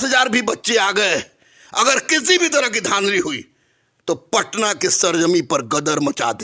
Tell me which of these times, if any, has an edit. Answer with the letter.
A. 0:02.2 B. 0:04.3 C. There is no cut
C